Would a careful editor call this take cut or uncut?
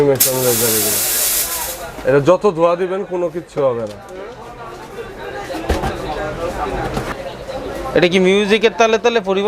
cut